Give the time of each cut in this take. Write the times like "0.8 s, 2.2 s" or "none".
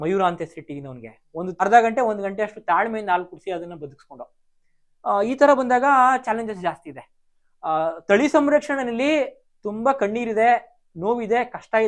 1.6 s